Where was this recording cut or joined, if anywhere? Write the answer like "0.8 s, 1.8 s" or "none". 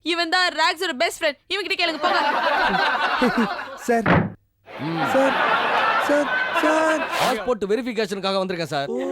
7.1 s

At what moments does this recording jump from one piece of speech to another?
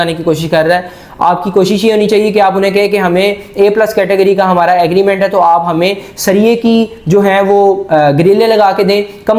none

